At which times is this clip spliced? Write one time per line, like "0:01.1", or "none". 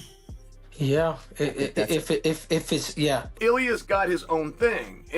0:03.4